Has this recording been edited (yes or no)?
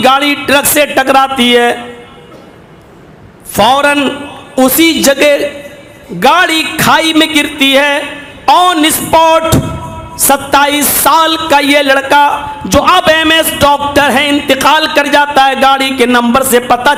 no